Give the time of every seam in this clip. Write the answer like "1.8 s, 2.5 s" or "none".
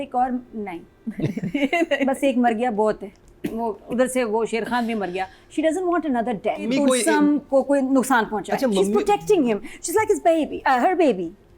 none